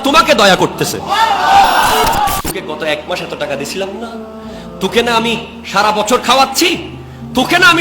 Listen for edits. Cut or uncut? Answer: cut